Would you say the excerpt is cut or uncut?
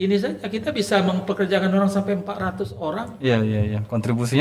uncut